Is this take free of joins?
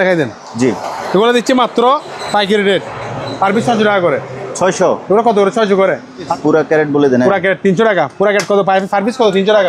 no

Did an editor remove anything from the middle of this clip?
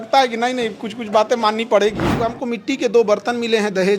yes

